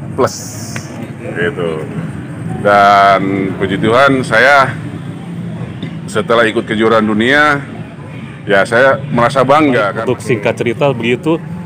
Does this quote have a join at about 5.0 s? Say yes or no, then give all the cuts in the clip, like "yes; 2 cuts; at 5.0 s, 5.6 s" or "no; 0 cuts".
no; 1 cut; at 10.0 s